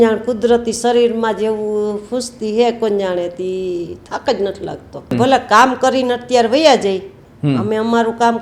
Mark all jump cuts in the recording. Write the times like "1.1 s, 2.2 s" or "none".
5.1 s

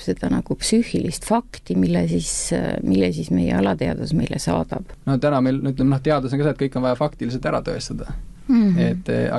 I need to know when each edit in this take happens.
4.9 s

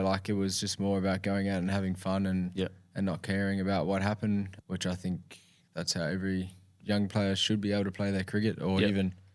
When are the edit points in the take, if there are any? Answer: 4.6 s, 6.8 s

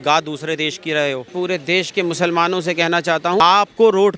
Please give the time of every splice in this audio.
1.3 s, 3.4 s

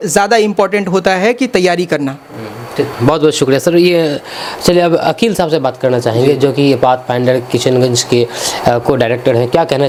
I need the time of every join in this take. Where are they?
none

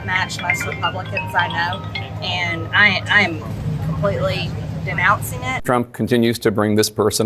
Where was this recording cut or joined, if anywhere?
5.5 s

